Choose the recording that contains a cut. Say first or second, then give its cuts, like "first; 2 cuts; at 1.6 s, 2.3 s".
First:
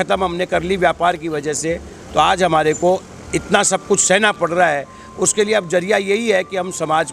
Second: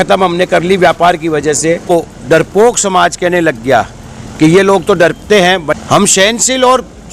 second; 2 cuts; at 1.9 s, 5.7 s